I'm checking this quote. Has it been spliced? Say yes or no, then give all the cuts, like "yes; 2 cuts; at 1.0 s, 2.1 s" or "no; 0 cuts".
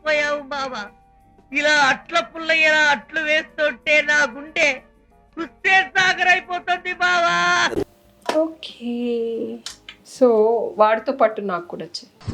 no; 0 cuts